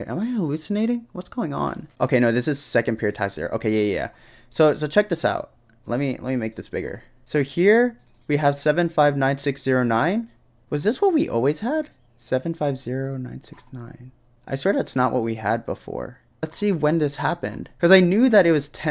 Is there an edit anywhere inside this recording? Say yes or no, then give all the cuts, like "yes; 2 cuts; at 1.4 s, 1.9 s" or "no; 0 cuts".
no; 0 cuts